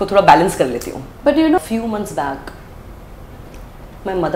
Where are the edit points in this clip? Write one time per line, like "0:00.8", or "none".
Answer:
0:01.6